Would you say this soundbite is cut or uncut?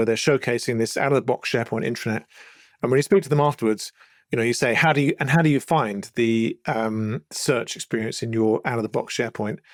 uncut